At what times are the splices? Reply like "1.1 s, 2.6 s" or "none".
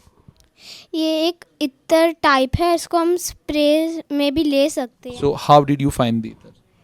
5.0 s